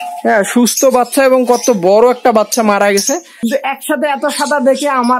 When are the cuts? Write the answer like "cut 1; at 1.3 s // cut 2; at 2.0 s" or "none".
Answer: cut 1; at 3.3 s